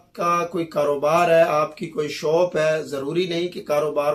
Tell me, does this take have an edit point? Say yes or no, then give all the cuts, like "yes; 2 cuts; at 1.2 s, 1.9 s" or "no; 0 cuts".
no; 0 cuts